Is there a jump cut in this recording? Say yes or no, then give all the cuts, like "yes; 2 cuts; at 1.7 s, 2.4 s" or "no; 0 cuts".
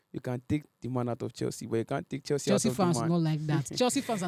no; 0 cuts